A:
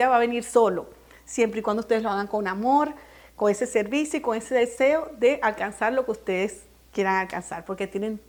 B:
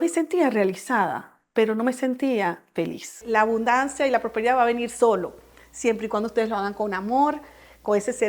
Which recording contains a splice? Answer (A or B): B